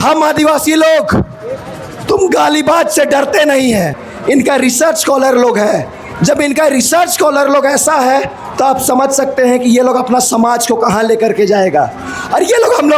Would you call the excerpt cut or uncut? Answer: cut